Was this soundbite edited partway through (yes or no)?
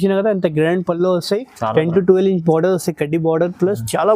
no